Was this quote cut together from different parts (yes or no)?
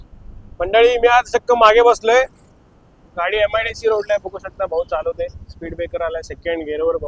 no